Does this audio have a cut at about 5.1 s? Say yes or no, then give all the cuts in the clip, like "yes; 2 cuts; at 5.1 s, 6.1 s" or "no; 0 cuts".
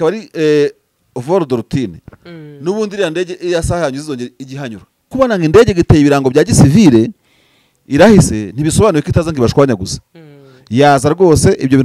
yes; 1 cut; at 5.1 s